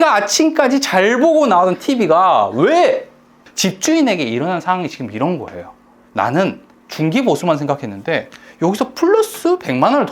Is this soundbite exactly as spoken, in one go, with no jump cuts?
no; 1 cut; at 3.4 s

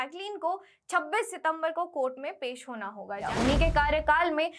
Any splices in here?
yes; 1 cut; at 3.2 s

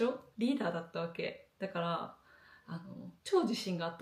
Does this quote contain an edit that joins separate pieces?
no; 0 cuts

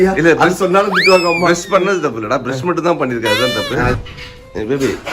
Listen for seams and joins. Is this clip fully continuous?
no; 1 cut; at 4.0 s

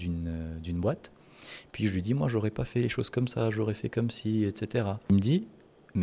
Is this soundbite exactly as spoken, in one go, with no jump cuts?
no; 1 cut; at 5.1 s

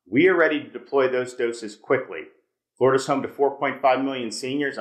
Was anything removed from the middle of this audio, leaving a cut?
no; 0 cuts

